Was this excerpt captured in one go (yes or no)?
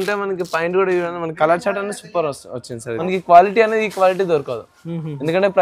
no